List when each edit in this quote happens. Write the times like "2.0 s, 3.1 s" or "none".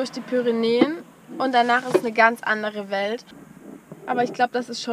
3.2 s